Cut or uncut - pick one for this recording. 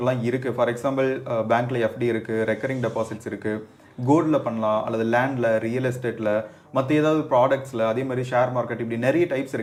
uncut